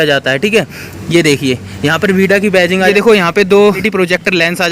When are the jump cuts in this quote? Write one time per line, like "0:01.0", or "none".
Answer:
0:02.9
0:03.8